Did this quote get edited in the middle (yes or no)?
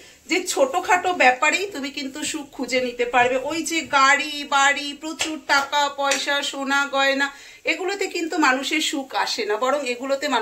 no